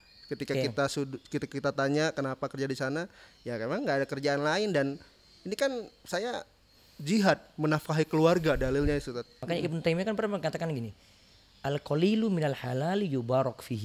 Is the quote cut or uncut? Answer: cut